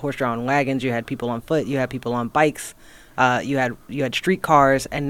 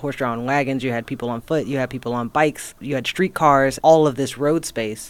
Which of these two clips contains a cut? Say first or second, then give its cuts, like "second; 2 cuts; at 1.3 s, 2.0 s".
second; 2 cuts; at 2.7 s, 3.8 s